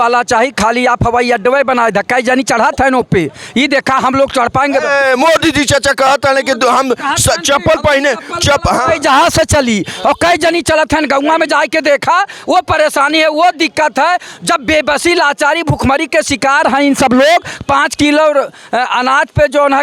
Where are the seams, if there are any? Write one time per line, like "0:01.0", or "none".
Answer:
none